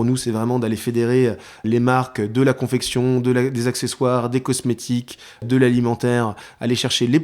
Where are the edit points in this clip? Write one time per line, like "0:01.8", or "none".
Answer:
0:01.6
0:05.4